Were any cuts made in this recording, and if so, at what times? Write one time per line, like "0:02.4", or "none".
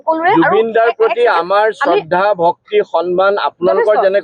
none